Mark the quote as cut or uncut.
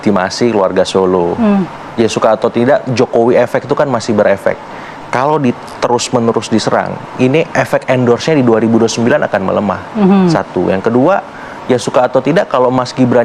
uncut